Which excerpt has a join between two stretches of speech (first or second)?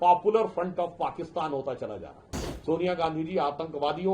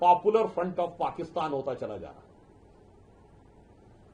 first